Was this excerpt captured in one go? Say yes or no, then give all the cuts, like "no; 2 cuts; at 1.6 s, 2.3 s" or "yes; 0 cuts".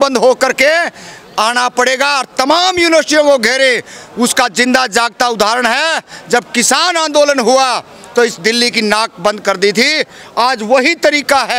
yes; 0 cuts